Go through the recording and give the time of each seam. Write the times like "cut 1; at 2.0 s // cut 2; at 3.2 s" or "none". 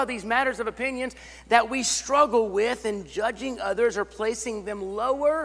none